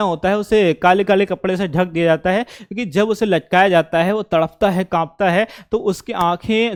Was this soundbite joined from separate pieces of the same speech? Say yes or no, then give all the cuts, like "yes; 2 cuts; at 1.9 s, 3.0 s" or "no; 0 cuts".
no; 0 cuts